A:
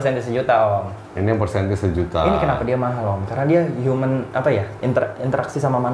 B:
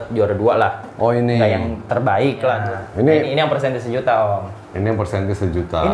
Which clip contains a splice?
B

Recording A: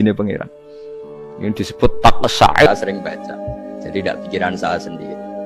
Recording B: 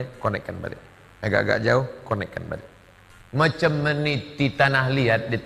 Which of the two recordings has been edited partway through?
A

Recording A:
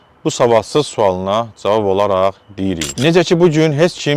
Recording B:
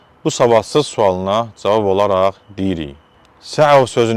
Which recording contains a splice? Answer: A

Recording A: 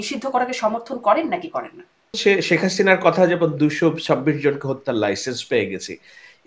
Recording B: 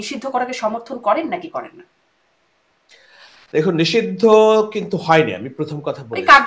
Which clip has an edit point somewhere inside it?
A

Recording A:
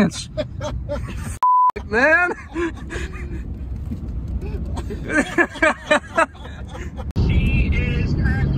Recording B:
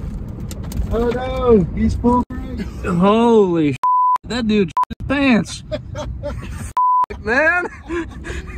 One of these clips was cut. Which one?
A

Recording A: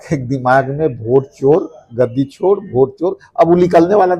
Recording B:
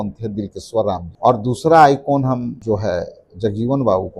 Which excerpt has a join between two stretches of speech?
B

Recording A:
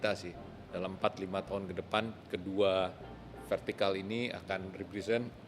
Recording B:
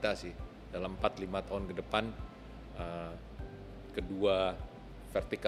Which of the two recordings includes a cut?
A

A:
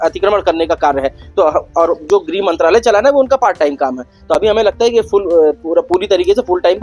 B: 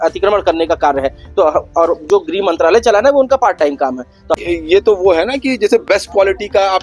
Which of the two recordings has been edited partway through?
B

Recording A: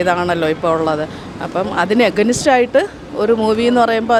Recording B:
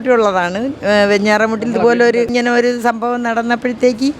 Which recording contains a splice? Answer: B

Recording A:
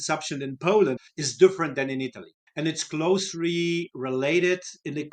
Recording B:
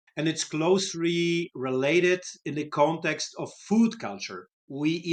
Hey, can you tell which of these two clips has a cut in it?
A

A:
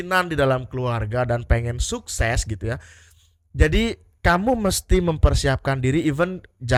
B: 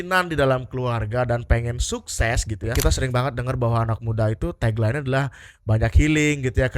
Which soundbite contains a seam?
B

